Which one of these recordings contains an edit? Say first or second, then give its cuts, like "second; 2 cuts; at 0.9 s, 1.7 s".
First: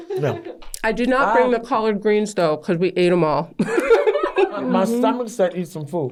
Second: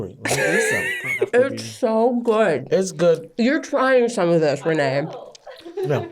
second; 1 cut; at 1.3 s